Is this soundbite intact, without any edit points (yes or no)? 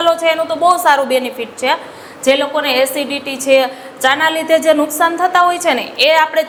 yes